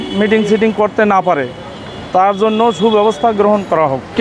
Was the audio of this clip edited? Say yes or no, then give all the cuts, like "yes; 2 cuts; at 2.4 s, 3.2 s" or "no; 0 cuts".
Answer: no; 0 cuts